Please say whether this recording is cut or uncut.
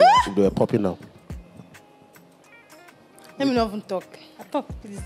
uncut